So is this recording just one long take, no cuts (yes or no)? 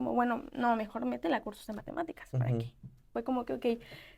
no